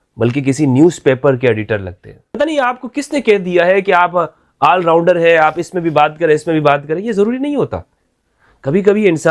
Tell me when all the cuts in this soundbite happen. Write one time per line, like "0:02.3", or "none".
0:02.4